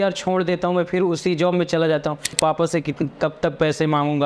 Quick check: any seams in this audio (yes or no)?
yes